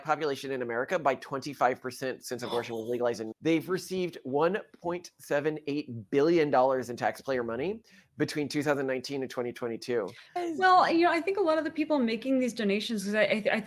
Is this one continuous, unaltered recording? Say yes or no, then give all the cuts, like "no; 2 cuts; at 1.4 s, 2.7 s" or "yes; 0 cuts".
no; 2 cuts; at 3.2 s, 10.4 s